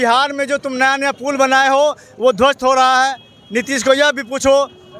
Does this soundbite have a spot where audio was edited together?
no; 0 cuts

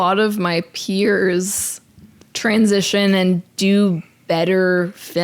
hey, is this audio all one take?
yes; 0 cuts

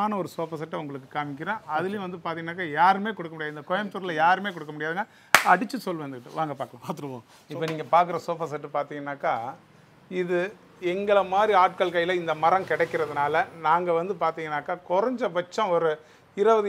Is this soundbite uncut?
yes; 0 cuts

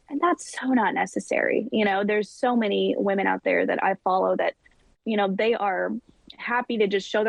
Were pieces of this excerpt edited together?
no; 0 cuts

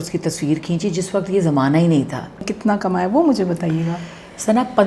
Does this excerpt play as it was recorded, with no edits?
no; 1 cut; at 2.5 s

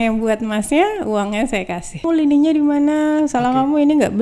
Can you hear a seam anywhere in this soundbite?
yes; 1 cut; at 2.0 s

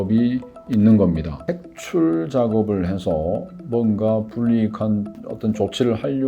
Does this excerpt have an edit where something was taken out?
yes; 1 cut; at 1.4 s

